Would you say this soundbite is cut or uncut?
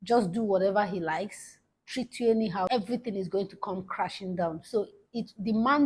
cut